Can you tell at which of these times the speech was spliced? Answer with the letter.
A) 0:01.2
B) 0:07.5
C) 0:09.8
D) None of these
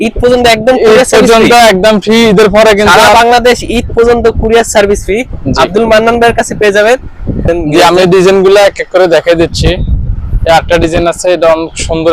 B